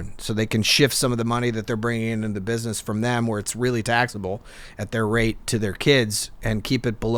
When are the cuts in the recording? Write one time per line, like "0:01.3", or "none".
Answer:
none